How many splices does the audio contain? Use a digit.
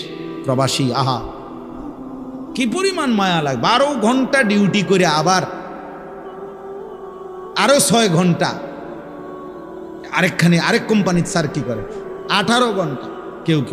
4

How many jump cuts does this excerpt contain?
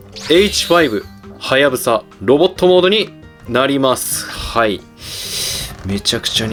0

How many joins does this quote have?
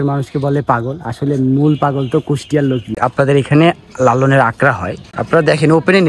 2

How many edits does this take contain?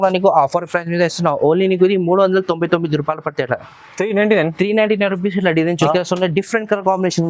1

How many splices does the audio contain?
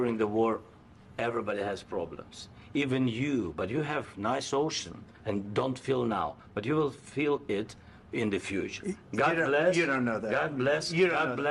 0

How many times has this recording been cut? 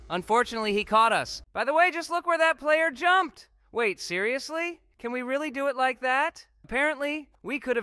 2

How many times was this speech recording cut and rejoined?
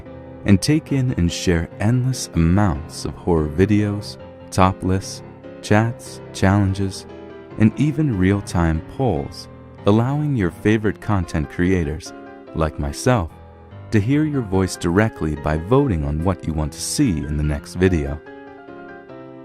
1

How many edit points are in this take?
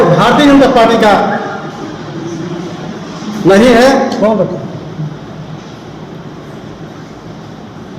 0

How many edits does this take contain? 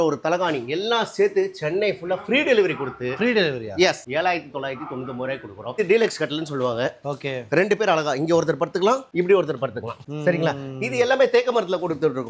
1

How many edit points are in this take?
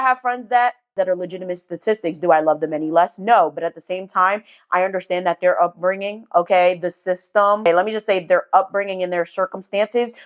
1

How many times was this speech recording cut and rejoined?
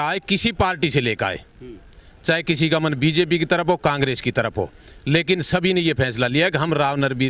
0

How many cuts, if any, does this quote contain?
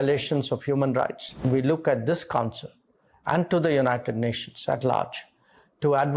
1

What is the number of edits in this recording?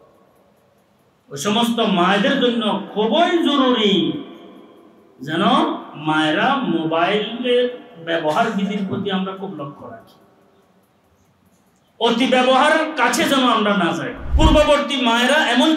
1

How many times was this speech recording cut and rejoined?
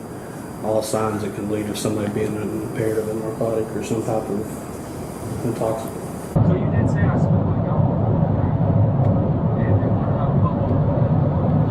1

